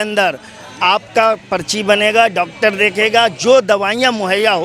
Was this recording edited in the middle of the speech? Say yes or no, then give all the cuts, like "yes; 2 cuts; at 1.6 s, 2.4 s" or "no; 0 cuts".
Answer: no; 0 cuts